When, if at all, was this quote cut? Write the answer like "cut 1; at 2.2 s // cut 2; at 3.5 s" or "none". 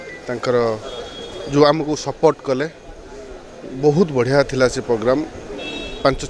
none